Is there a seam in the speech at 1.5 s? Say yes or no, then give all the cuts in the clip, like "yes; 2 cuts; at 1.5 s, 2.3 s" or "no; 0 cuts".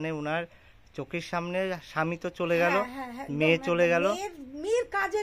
no; 0 cuts